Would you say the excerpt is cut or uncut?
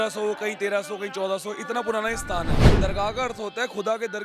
cut